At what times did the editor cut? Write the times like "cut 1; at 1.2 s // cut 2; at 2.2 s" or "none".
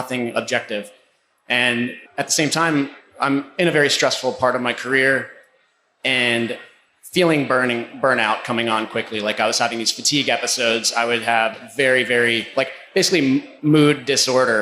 cut 1; at 2.0 s // cut 2; at 13.5 s